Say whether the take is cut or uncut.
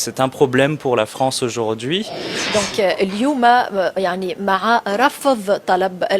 cut